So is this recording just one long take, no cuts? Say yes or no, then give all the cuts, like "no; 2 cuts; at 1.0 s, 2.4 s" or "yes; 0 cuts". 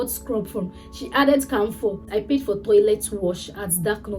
no; 1 cut; at 2.1 s